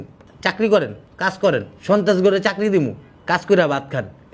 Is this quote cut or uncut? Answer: uncut